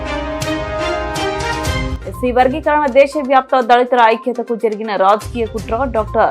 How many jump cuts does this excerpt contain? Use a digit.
1